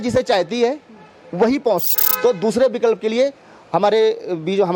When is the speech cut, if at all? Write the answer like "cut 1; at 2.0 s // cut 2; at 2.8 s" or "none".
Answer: cut 1; at 1.9 s